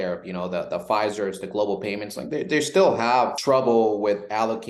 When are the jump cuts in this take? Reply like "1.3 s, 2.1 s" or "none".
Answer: 3.4 s